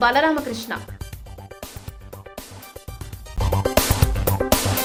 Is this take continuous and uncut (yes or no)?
yes